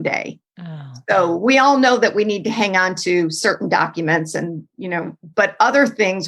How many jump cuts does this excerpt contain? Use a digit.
0